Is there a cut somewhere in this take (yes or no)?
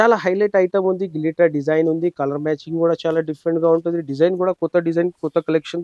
no